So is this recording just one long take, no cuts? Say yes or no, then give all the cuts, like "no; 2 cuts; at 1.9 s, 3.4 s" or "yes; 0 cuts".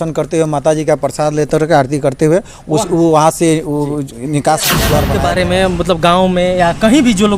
no; 1 cut; at 5.0 s